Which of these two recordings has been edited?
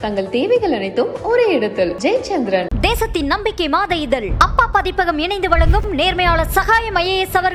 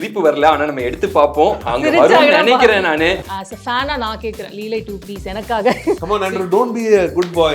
second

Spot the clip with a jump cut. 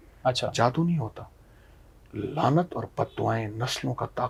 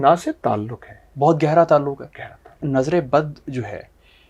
second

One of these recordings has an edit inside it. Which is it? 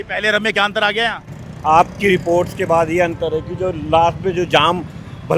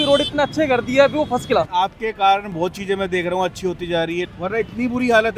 second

